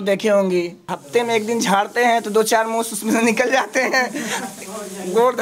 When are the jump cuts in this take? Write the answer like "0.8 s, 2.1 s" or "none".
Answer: 0.9 s